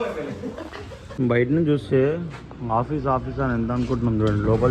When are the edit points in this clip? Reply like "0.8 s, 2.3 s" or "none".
1.2 s